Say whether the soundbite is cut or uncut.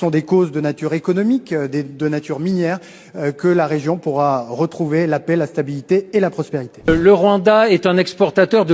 cut